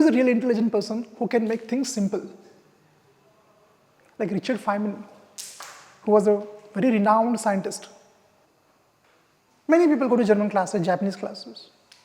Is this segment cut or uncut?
cut